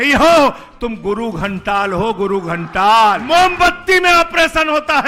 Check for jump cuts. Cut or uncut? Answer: cut